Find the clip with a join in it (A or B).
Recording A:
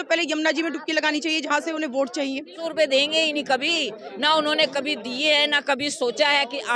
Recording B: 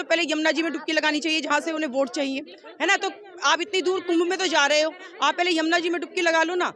A